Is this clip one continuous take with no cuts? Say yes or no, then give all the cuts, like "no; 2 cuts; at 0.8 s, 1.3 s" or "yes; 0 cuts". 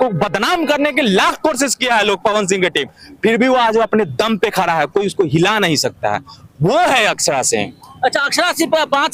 yes; 0 cuts